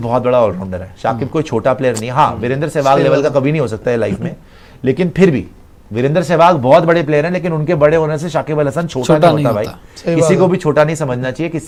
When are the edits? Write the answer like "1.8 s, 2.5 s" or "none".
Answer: none